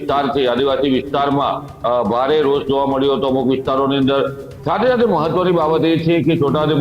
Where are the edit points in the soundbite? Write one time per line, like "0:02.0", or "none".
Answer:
none